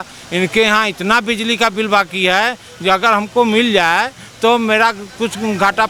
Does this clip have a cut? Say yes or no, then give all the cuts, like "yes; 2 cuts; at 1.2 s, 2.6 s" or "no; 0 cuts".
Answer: no; 0 cuts